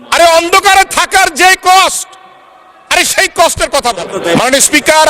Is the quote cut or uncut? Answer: cut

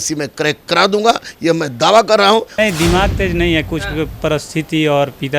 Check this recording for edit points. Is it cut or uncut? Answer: cut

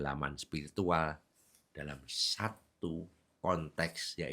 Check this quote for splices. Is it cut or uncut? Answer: uncut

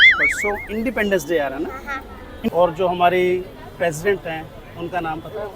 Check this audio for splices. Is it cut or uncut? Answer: cut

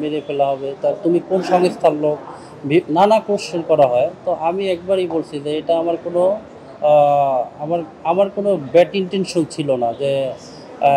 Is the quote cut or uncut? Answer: uncut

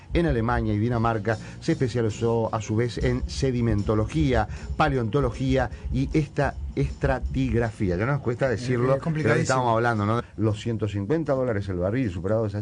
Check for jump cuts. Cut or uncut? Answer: uncut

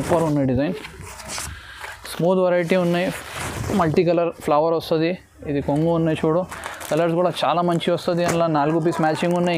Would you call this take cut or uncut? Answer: uncut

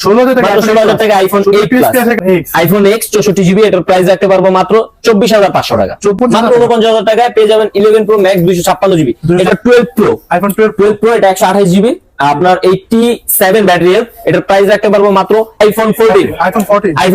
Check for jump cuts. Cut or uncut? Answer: cut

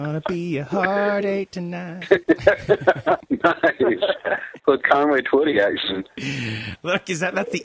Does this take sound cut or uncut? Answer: cut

